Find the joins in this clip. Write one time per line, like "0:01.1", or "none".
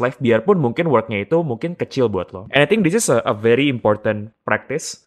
0:02.4